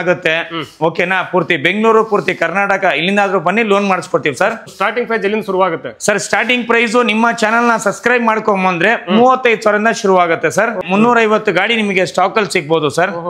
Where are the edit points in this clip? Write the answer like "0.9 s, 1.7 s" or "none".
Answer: 4.7 s, 10.8 s